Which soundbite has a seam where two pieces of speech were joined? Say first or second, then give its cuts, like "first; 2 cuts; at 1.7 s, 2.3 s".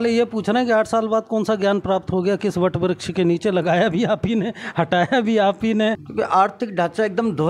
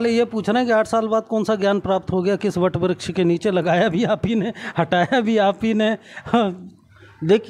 first; 1 cut; at 6.0 s